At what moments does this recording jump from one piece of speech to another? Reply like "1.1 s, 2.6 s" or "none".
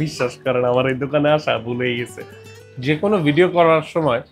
2.7 s